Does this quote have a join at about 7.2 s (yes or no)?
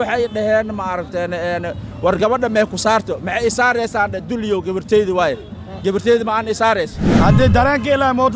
yes